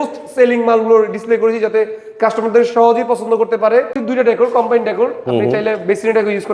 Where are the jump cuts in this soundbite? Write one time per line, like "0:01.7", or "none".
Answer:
0:04.0